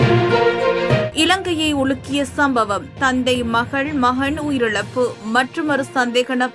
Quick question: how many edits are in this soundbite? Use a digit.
0